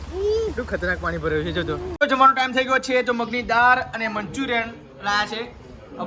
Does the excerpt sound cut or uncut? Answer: cut